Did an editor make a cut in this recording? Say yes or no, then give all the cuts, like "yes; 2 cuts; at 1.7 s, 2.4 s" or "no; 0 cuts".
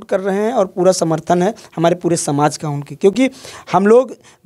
no; 0 cuts